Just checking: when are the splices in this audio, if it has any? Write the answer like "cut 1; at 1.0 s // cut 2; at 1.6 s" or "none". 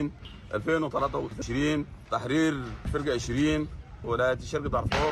none